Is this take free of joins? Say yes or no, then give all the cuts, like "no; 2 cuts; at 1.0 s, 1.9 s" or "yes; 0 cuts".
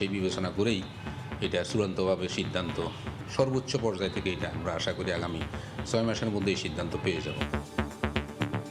no; 1 cut; at 7.7 s